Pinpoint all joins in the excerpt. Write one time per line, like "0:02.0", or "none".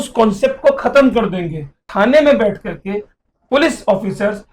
0:01.8